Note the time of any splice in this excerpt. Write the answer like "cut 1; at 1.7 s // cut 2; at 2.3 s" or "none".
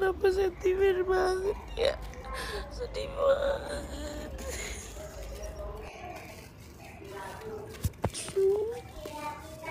none